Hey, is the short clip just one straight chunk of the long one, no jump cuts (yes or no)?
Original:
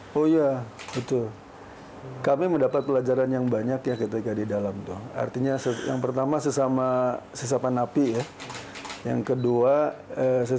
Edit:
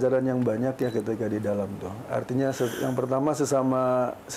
yes